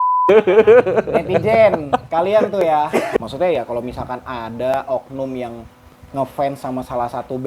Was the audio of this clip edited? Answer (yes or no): yes